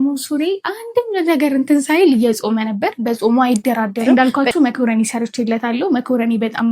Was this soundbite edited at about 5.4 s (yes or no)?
no